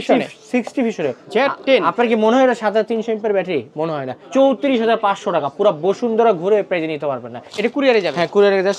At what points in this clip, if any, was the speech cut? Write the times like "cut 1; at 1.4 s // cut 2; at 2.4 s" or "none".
cut 1; at 1.2 s // cut 2; at 4.1 s // cut 3; at 7.4 s